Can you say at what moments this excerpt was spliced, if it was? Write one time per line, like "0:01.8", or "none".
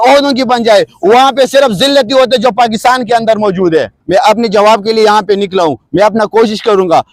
0:04.0